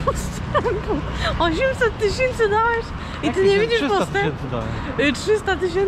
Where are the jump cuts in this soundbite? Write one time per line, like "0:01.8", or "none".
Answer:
none